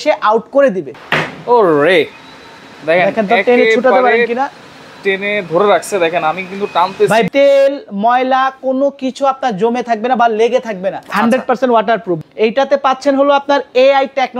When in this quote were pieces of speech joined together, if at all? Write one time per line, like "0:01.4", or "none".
0:00.9
0:07.3
0:11.0
0:12.2